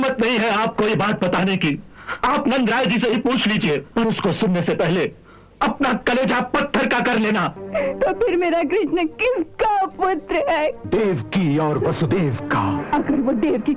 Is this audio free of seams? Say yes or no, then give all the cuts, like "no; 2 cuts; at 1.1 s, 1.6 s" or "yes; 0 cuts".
no; 4 cuts; at 3.9 s, 7.6 s, 10.8 s, 12.8 s